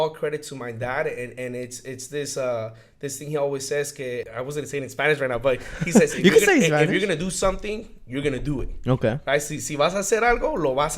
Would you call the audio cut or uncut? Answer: cut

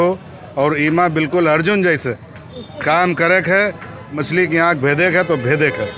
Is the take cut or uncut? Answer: cut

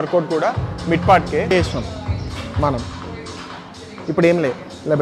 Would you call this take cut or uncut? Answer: cut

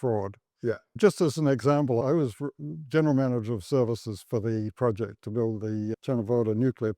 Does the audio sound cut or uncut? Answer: cut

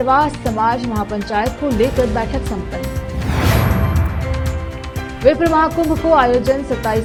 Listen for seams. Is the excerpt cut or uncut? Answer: uncut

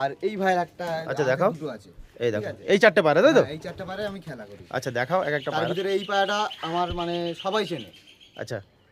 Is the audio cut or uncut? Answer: uncut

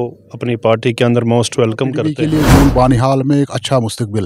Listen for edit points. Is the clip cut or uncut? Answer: cut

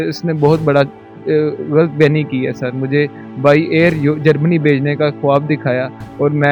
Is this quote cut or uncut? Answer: uncut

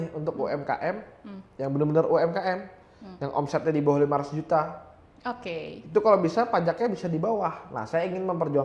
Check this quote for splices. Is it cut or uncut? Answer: uncut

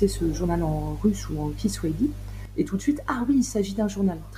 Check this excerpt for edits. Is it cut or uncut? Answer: uncut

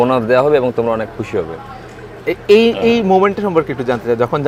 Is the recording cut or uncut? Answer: uncut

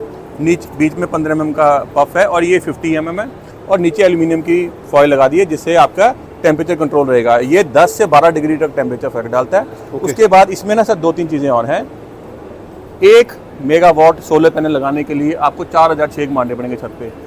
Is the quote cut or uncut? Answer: uncut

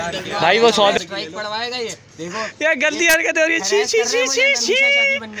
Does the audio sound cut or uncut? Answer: cut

